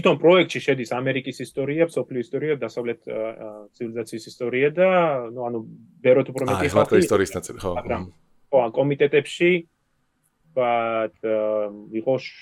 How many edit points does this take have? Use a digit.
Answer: 0